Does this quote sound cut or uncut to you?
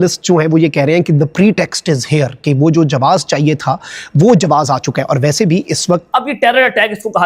cut